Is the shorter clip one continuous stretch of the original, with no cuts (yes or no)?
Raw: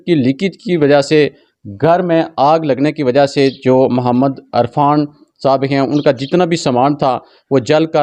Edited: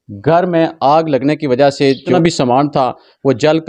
no